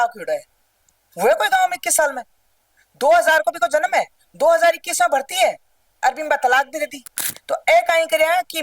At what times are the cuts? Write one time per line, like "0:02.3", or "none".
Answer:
0:07.3

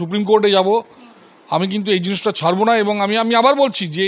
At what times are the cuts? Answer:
none

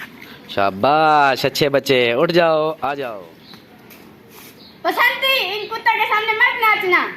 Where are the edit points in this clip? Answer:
0:03.0

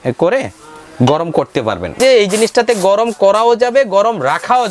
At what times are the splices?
0:02.0

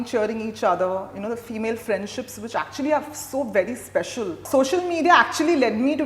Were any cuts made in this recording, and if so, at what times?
0:04.4

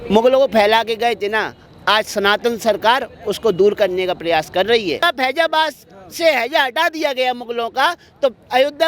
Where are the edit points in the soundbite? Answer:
0:05.0

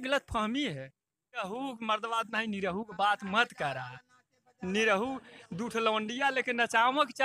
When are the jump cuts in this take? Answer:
0:01.4

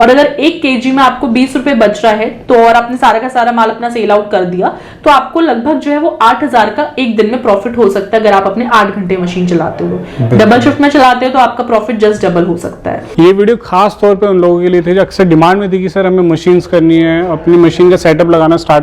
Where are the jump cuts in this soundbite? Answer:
0:13.0

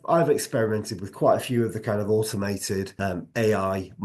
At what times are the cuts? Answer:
0:02.9

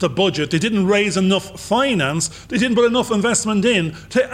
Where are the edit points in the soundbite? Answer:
none

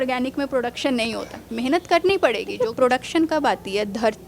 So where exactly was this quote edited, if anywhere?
0:02.5

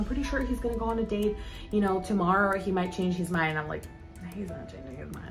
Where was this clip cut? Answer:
none

